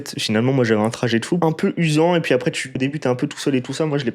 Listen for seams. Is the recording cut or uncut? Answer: cut